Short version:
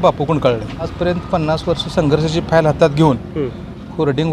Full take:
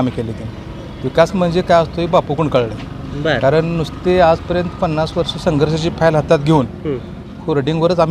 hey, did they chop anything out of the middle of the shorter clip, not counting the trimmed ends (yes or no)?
yes